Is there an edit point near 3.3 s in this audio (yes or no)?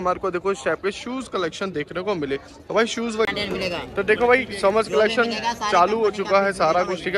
yes